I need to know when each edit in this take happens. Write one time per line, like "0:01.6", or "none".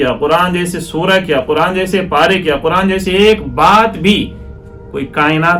none